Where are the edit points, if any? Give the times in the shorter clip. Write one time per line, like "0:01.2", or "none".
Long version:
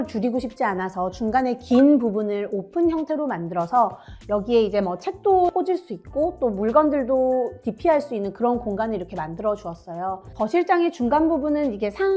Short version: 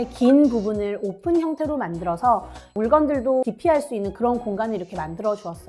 0:02.7
0:03.4